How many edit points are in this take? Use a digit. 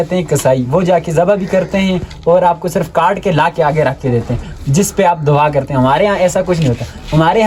0